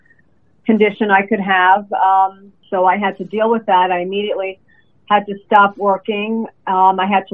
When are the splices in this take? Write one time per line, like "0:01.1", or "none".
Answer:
0:02.5